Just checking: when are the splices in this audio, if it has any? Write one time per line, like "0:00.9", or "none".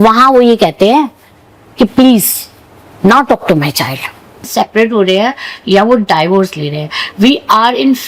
0:04.5